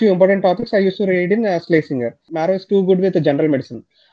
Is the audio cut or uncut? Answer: cut